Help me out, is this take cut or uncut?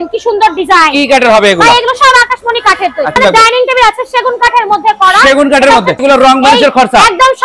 cut